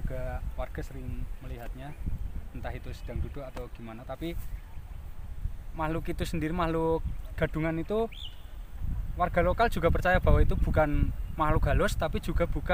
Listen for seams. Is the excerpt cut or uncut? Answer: uncut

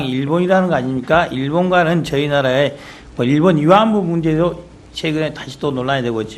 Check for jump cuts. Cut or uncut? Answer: cut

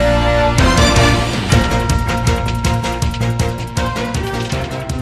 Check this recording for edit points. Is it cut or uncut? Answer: uncut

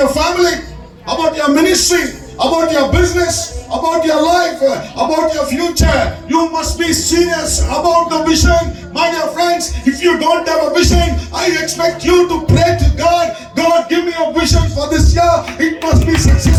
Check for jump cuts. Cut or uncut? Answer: uncut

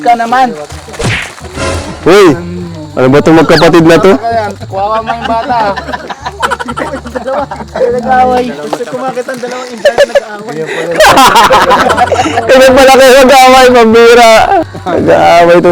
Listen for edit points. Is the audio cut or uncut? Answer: cut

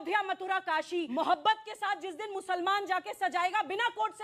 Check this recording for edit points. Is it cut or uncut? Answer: cut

